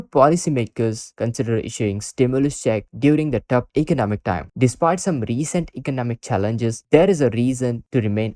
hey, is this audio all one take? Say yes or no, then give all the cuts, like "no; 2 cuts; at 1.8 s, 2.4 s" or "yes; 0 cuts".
no; 1 cut; at 4.5 s